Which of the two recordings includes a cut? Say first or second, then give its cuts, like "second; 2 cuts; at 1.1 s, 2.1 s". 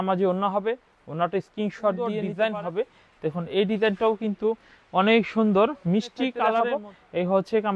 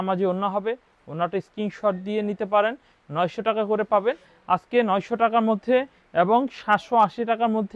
first; 2 cuts; at 2.2 s, 6.6 s